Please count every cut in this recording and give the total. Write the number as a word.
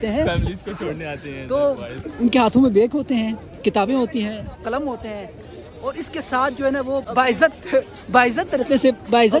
one